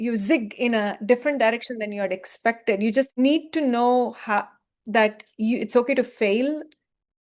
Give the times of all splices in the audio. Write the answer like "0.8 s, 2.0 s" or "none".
3.2 s